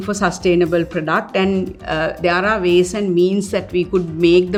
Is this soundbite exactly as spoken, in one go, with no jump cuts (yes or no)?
yes